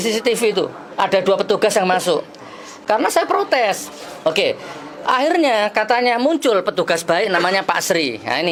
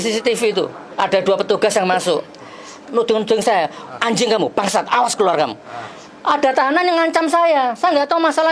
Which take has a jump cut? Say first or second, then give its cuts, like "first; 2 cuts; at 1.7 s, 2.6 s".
second; 1 cut; at 2.8 s